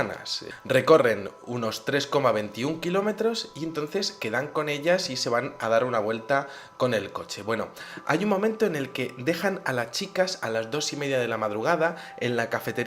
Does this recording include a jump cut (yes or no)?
yes